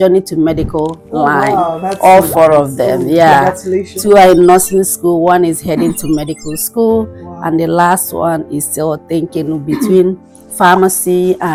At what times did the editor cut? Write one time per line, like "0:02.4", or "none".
none